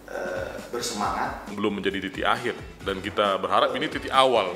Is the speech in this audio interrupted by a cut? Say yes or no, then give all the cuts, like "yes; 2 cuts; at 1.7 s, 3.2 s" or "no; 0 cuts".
yes; 1 cut; at 1.5 s